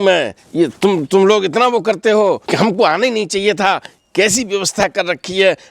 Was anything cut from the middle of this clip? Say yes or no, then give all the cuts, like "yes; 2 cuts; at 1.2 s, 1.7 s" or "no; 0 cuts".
yes; 1 cut; at 2.4 s